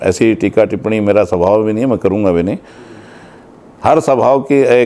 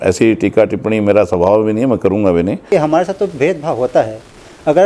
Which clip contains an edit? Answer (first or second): second